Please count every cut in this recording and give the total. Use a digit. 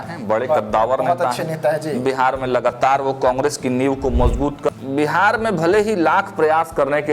1